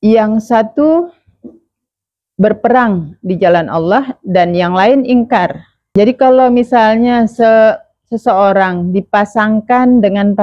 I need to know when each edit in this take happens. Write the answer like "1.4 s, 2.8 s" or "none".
6.0 s